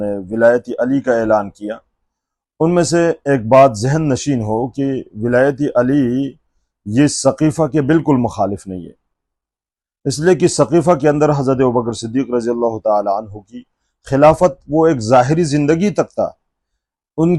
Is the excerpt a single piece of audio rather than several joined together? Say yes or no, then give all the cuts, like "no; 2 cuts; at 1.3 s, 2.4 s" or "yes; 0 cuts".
yes; 0 cuts